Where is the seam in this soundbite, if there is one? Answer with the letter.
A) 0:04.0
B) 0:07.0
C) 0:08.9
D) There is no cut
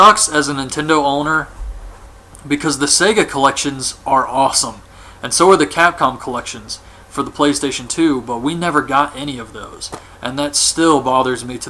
C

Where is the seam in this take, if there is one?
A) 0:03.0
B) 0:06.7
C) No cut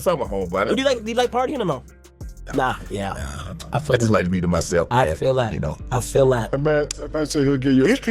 B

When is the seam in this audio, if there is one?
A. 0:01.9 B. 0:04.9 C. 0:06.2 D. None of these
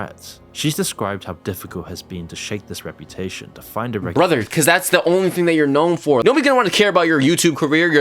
C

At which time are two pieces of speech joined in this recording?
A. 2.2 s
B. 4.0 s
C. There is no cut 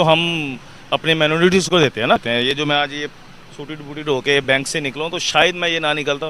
A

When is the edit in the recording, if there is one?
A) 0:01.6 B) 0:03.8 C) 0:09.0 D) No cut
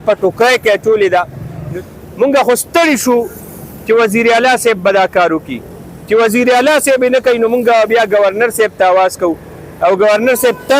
A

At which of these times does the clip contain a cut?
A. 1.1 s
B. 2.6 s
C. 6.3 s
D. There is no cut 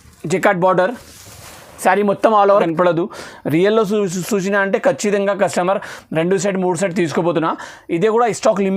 B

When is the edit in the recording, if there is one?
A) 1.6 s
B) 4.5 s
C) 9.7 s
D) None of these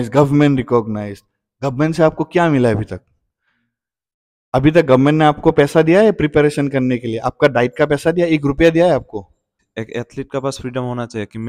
C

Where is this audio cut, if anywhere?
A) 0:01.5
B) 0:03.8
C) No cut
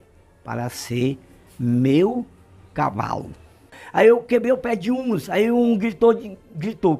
B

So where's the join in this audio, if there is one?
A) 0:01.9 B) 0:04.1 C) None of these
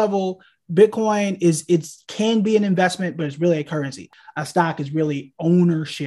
B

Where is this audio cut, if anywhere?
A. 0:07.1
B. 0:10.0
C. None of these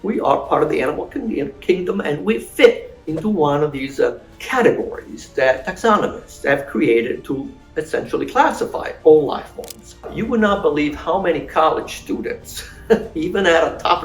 B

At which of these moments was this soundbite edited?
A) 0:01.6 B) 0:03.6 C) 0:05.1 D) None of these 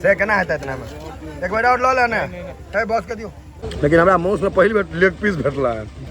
B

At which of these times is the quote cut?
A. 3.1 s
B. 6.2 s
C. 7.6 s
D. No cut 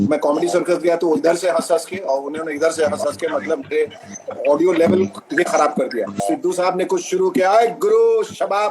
B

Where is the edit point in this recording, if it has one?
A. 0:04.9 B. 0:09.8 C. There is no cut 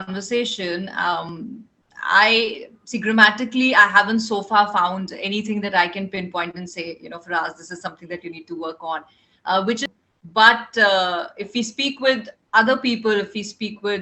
B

